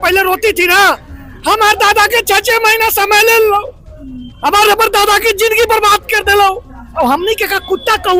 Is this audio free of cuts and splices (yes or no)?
yes